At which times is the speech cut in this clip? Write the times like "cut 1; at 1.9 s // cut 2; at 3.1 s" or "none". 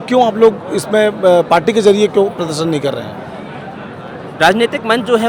none

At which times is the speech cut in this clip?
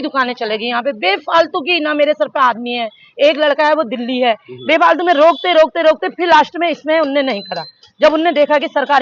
none

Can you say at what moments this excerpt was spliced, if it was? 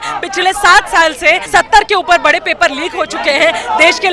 cut 1; at 1.4 s

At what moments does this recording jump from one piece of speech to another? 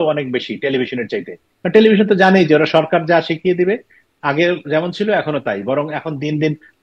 none

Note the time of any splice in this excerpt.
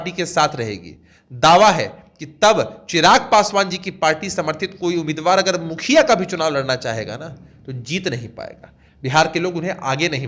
none

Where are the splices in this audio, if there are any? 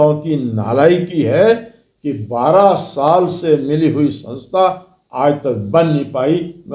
none

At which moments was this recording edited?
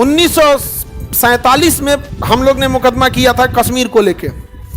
cut 1; at 2.1 s

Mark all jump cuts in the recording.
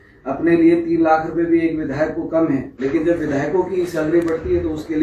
cut 1; at 2.7 s

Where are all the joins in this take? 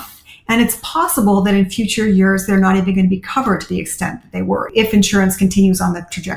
cut 1; at 4.7 s

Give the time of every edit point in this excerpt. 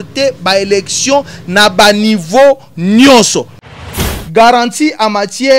cut 1; at 3.7 s

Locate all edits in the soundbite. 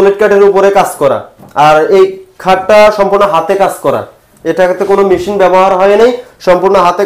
none

